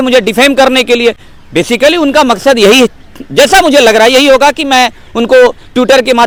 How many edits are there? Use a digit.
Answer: 0